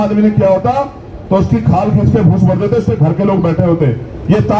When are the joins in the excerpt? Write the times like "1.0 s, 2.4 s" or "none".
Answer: none